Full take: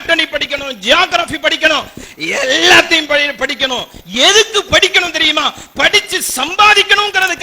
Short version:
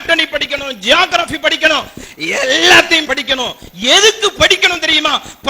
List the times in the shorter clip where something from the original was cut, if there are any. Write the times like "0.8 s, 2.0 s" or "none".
3.0 s